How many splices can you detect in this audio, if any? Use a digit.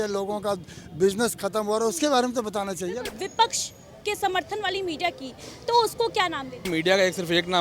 2